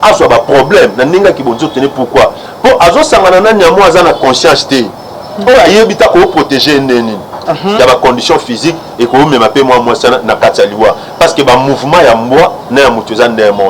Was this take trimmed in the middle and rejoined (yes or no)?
yes